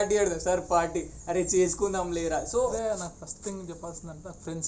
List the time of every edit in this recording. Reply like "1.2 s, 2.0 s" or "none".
2.7 s